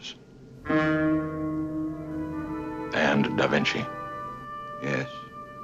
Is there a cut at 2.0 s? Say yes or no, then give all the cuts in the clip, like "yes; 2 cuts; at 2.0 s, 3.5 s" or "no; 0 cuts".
no; 0 cuts